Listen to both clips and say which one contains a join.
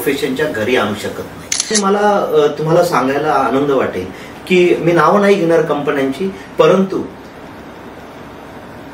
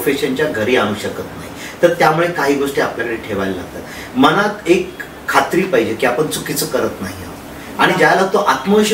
first; 1 cut; at 1.7 s

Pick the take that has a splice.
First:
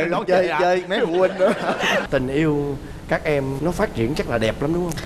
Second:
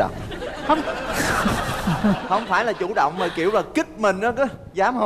first; 1 cut; at 2.0 s

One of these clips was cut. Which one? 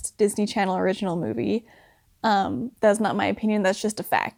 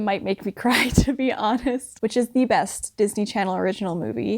second; 1 cut; at 1.9 s

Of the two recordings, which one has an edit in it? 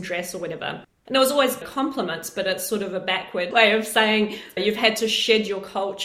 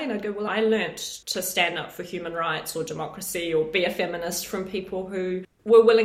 first; 1 cut; at 3.5 s

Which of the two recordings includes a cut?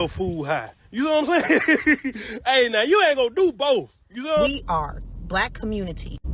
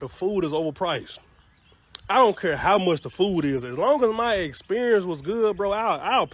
first; 1 cut; at 4.5 s

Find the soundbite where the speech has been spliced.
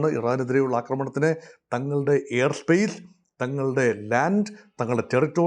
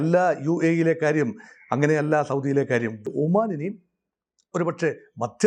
second; 1 cut; at 3.1 s

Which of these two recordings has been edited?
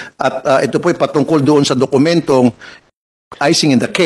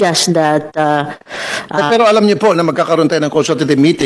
first; 1 cut; at 2.7 s

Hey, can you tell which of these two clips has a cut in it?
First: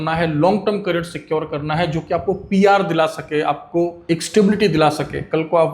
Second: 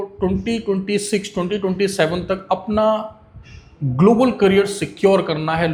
first; 1 cut; at 4.0 s

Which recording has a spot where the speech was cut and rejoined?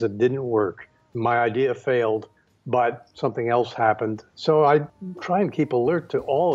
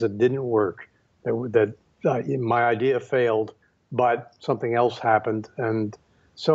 first; 3 cuts; at 1.1 s, 4.2 s, 4.9 s

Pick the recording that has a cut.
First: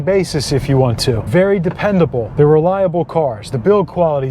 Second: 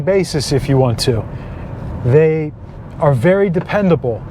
first; 2 cuts; at 1.3 s, 2.2 s

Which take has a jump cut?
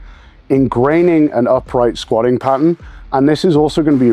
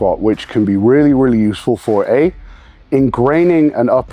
first; 1 cut; at 2.9 s

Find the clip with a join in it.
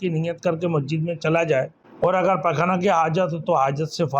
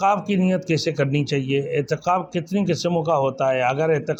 first; 1 cut; at 1.8 s

